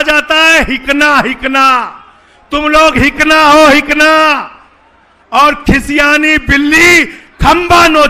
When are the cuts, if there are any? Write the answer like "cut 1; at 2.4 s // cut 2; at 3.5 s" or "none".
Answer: none